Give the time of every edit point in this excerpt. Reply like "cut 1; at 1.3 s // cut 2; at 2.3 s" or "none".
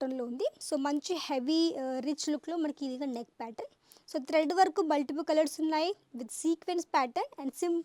none